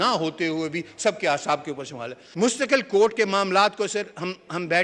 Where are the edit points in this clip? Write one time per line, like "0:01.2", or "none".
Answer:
0:02.2